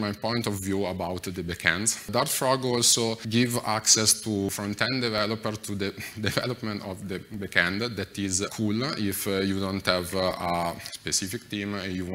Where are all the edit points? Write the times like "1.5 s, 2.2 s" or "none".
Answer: 2.1 s, 3.2 s, 4.5 s, 8.5 s